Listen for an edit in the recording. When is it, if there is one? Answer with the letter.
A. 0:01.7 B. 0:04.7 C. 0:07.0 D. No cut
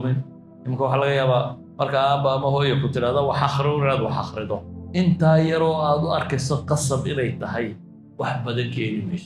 B